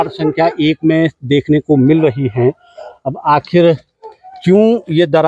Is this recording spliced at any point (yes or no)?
no